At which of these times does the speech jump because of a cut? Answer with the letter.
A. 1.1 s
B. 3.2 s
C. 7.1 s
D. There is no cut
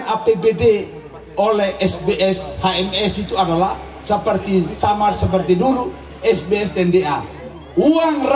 D